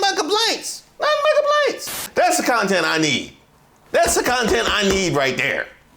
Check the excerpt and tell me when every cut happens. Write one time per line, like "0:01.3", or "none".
0:02.0